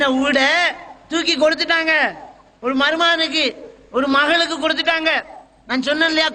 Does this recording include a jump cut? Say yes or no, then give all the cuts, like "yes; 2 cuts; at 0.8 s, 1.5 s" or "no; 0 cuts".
no; 0 cuts